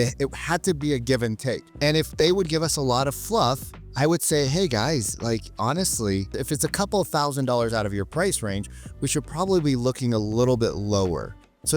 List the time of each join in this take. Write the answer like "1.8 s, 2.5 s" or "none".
1.7 s, 6.4 s